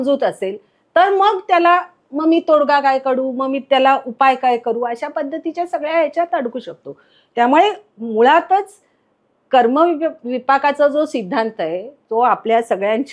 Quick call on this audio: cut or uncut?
uncut